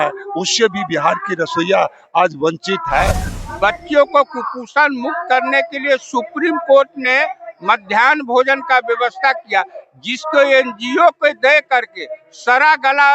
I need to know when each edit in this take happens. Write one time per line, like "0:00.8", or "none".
0:03.3